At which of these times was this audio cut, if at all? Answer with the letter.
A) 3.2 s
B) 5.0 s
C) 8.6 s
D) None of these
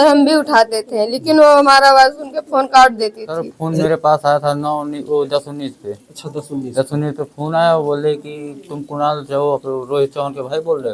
A